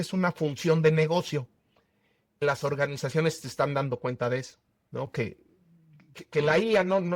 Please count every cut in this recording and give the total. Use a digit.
1